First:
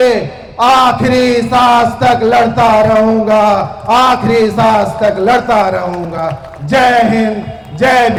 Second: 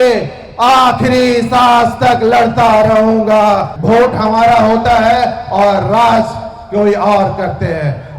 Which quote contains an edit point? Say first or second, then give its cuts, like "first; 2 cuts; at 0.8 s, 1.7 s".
second; 1 cut; at 3.7 s